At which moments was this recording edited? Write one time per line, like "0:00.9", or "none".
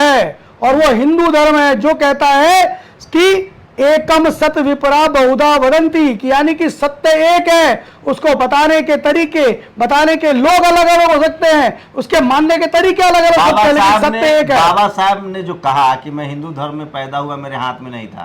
none